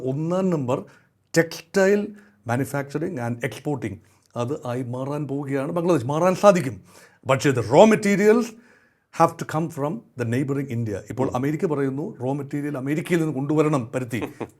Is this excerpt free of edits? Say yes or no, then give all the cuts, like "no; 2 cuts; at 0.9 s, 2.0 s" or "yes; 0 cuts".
yes; 0 cuts